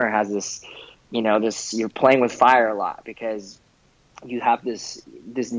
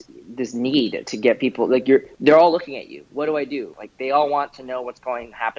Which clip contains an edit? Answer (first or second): second